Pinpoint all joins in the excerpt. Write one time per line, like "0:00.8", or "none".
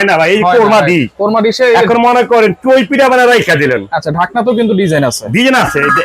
none